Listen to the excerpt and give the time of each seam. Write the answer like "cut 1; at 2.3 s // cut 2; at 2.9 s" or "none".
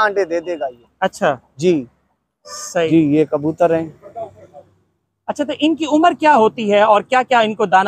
cut 1; at 2.9 s